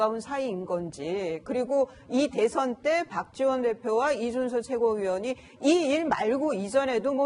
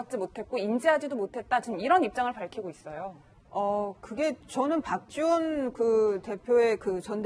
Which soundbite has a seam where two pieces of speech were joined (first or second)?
second